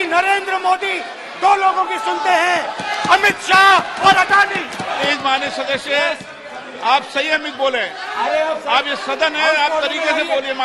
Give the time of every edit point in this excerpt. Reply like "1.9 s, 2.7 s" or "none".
5.0 s